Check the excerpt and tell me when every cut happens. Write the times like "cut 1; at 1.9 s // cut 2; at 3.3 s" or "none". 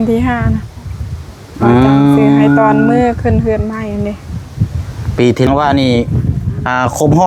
cut 1; at 5.5 s